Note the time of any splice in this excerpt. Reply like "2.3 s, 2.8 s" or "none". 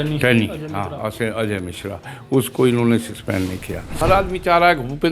4.0 s